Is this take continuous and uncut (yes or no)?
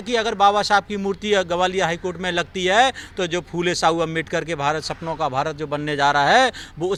yes